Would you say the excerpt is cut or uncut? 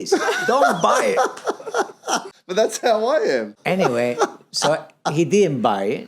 cut